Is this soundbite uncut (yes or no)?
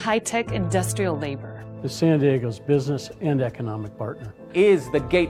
yes